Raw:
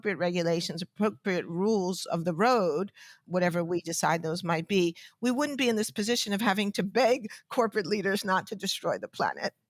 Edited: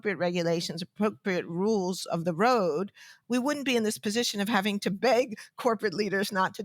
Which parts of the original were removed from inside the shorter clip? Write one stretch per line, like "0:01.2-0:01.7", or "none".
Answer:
0:03.1-0:05.1

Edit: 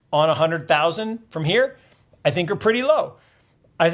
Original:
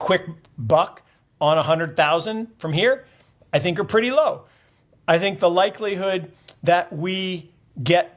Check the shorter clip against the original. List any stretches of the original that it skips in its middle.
none

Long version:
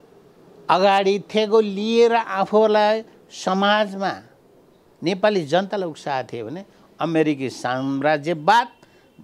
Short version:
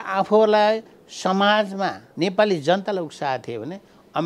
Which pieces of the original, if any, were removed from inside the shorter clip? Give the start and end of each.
0:04.3-0:04.9

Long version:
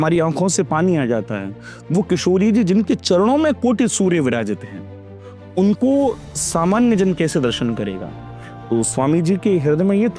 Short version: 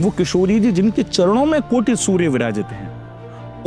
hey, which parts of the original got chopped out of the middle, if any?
none

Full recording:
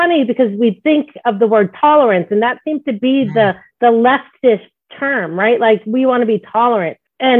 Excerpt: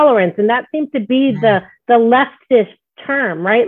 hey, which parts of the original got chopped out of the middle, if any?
none

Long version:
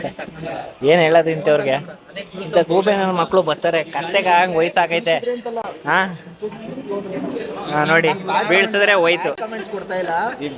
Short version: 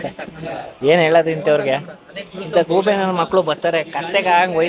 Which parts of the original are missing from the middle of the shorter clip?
none

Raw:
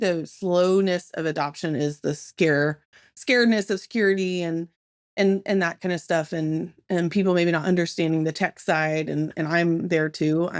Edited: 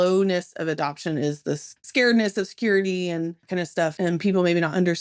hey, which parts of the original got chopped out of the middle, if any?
0:02.3-0:03.0
0:05.1-0:06.7

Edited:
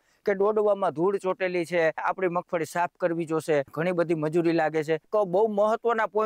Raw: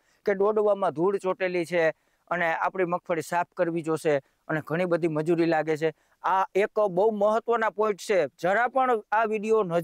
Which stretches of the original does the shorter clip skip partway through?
0:02.0-0:02.6
0:04.3-0:04.7
0:06.0-0:06.7

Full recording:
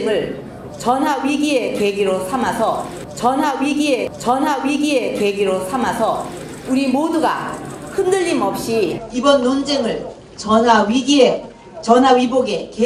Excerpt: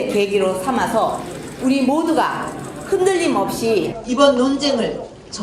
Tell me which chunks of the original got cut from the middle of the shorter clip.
0:02.9-0:06.3

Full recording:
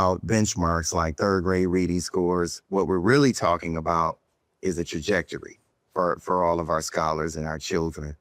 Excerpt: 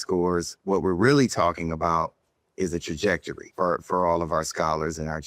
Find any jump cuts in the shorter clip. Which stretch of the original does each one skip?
0:05.4-0:05.8

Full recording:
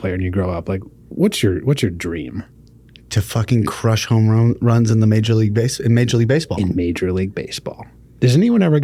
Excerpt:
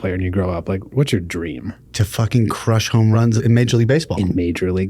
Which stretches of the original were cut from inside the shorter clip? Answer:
0:00.9-0:01.6
0:02.5-0:03.0
0:04.4-0:05.6

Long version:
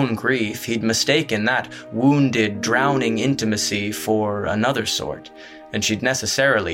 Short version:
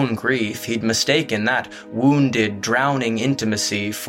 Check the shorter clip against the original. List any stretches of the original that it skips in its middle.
none

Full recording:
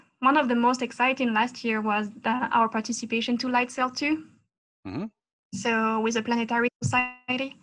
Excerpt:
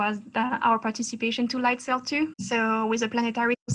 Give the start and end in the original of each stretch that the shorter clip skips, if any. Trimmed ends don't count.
0:04.3-0:05.5

